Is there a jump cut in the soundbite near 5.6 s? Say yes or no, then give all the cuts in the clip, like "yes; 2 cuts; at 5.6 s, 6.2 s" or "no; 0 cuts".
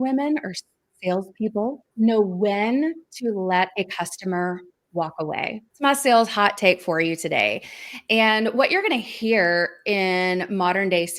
yes; 2 cuts; at 1.8 s, 5.6 s